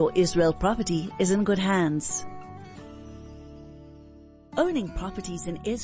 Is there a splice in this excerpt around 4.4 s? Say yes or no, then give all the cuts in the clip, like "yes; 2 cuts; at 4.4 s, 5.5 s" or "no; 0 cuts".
yes; 2 cuts; at 2.1 s, 4.4 s